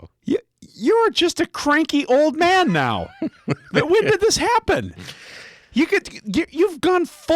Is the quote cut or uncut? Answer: uncut